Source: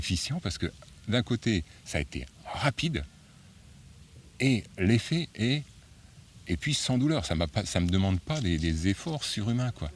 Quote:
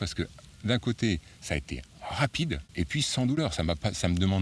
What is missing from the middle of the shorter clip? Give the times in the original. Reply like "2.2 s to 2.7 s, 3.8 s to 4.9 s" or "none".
3.1 s to 6.4 s